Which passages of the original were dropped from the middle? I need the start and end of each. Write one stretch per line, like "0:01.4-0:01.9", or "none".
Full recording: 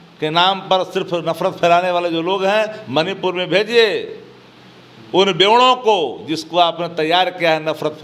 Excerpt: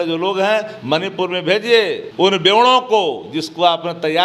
0:04.1-0:05.0